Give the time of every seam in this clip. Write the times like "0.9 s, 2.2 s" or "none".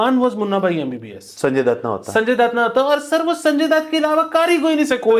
none